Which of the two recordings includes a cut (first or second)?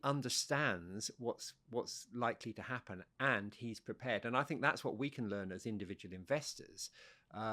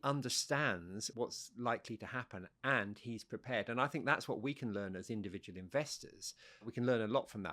second